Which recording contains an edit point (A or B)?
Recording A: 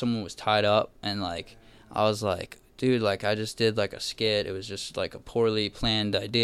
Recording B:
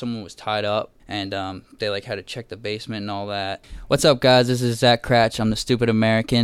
B